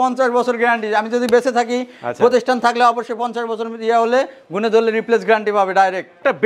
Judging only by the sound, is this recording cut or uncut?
uncut